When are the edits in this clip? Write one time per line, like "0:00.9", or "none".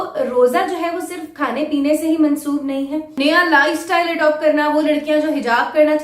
0:03.2